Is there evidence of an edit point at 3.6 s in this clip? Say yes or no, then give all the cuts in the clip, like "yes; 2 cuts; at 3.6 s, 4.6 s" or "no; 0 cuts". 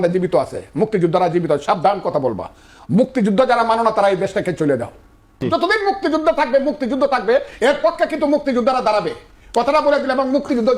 no; 1 cut; at 5.4 s